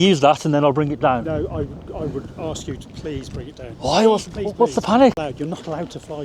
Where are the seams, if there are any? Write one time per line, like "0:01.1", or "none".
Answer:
0:05.2